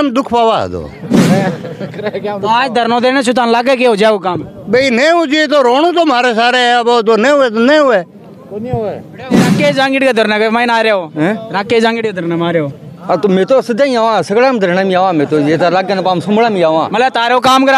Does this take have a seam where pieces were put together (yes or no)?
yes